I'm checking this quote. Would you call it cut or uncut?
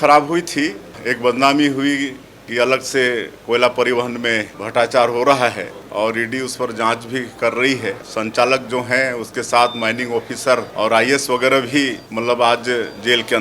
cut